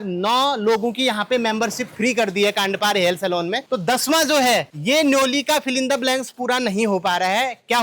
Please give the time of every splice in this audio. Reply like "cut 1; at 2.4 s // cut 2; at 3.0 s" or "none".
none

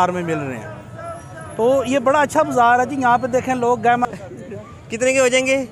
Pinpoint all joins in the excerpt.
cut 1; at 4.1 s

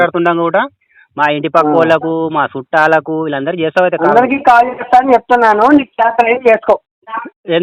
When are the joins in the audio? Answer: none

